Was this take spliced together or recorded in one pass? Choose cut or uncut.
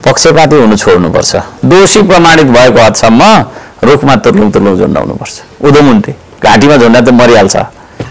cut